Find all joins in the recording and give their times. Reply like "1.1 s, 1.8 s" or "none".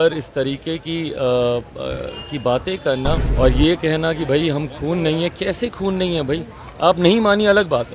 3.3 s

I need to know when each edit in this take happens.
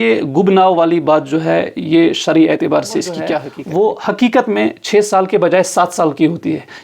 3.5 s

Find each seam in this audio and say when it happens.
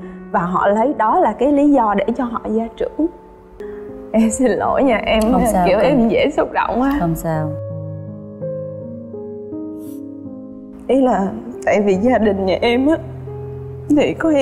3.7 s

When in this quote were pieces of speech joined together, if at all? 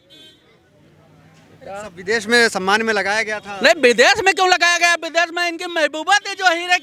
none

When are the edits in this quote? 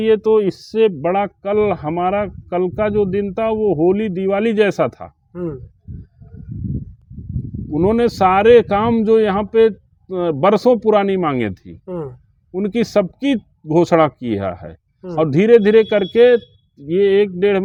none

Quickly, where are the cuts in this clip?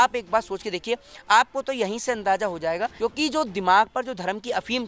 2.9 s

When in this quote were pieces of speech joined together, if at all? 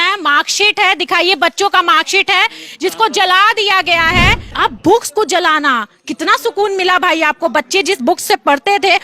4.4 s

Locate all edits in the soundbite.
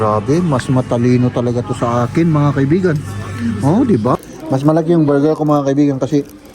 4.2 s

